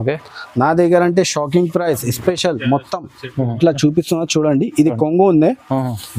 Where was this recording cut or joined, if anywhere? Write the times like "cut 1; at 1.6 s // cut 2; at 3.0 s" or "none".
cut 1; at 3.6 s